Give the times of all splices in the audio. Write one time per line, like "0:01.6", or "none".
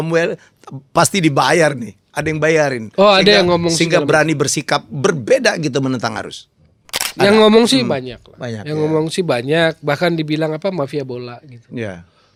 none